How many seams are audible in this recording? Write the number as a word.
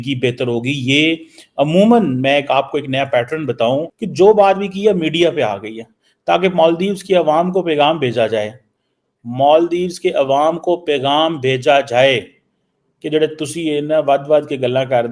one